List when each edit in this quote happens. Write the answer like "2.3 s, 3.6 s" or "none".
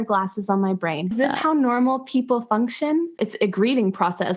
1.1 s, 3.2 s